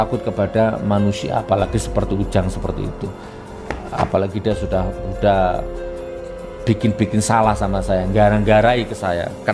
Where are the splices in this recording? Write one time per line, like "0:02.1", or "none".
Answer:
none